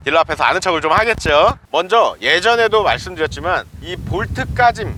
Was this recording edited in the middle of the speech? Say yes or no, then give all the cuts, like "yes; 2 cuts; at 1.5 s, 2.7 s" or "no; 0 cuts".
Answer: no; 0 cuts